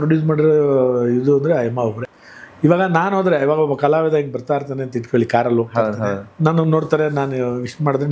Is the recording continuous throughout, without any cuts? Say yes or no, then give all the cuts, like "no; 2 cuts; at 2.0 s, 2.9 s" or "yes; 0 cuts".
no; 1 cut; at 2.0 s